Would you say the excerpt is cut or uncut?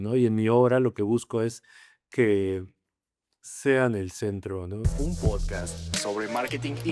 cut